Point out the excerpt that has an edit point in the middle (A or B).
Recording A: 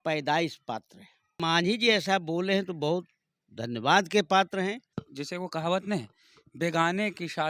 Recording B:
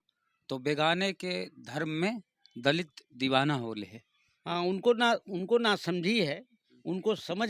A